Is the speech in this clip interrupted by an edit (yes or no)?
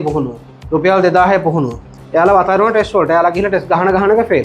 yes